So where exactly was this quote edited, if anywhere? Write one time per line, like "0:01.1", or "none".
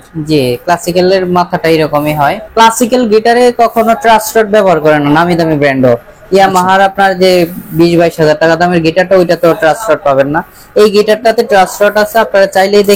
0:02.4